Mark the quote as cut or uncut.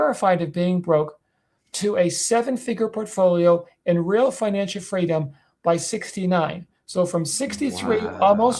uncut